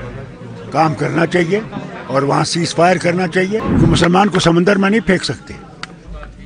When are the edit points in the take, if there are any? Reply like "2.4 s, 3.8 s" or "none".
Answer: 3.7 s